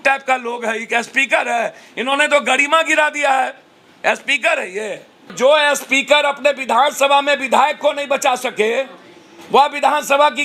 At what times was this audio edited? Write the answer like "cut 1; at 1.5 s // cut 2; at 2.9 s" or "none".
cut 1; at 5.3 s